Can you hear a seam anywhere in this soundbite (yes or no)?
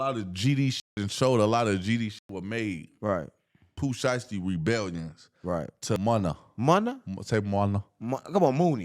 yes